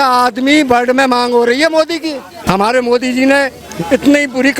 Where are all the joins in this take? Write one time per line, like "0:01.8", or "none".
0:02.4